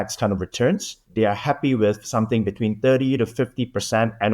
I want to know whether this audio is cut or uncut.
cut